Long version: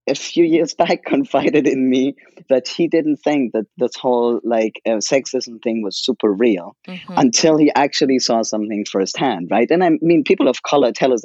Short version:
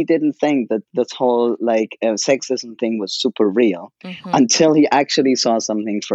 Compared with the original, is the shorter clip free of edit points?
yes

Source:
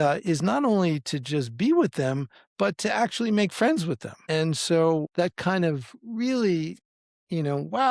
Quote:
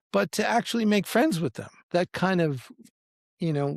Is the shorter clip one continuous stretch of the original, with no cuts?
no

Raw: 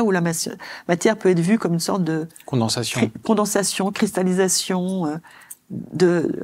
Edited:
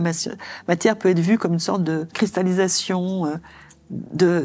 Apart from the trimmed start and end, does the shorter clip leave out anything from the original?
yes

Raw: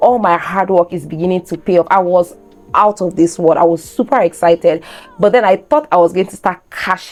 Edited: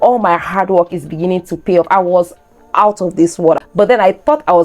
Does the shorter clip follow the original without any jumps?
no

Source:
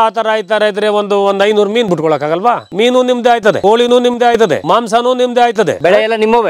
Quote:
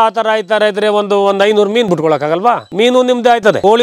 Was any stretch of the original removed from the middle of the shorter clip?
no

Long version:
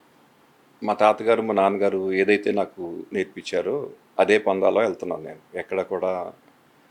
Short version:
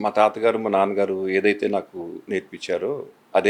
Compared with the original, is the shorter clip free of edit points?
yes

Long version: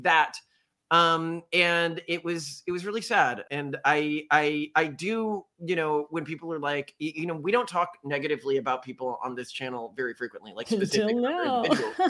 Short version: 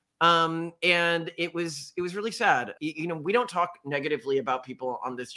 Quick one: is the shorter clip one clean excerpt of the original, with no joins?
no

